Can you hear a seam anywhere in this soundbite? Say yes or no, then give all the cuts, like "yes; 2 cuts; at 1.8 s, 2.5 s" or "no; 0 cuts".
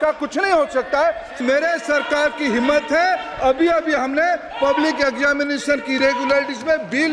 yes; 1 cut; at 1.4 s